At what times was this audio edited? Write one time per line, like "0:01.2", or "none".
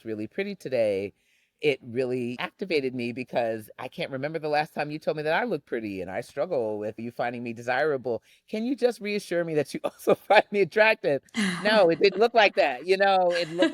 0:02.4
0:07.0